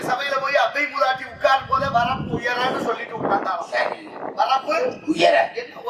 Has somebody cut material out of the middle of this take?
no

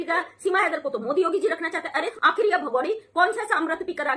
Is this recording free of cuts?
no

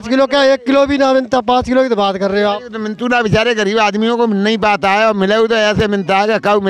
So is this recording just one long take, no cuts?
yes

